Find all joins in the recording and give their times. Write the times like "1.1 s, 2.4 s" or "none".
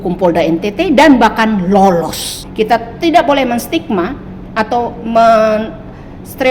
2.4 s